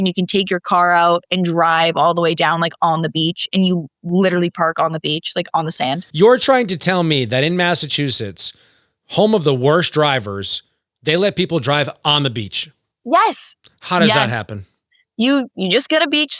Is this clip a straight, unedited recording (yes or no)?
no